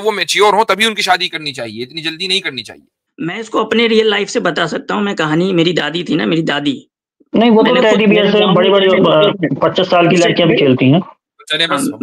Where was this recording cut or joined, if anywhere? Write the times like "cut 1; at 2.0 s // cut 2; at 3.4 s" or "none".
cut 1; at 3.4 s